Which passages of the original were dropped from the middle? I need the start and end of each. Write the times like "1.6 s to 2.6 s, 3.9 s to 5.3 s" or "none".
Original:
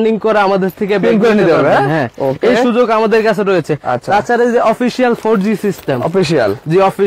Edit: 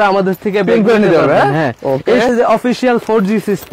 2.6 s to 4.4 s